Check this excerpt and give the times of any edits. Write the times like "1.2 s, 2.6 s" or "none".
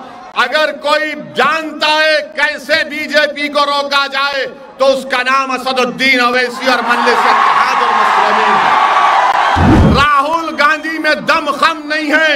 9.8 s